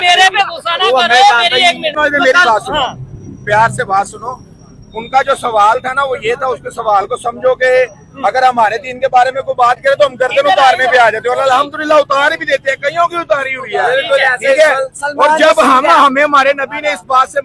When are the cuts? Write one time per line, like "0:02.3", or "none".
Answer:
0:02.0